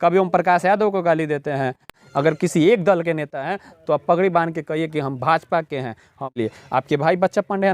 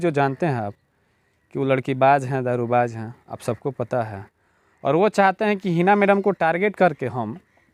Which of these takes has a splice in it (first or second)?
first